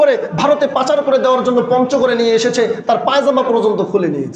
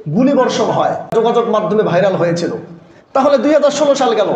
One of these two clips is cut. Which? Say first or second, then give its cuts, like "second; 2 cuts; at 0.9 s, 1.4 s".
second; 1 cut; at 1.2 s